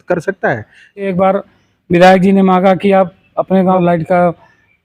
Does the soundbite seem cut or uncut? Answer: cut